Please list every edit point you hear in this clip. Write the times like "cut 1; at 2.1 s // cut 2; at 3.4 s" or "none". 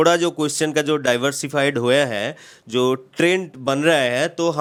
none